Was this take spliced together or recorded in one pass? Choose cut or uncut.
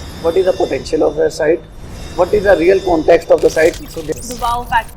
cut